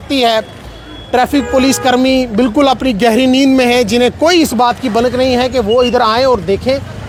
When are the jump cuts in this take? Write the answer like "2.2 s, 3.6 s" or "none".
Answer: none